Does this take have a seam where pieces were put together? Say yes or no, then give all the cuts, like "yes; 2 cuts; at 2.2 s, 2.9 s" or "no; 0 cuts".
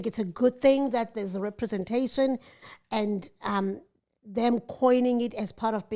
no; 0 cuts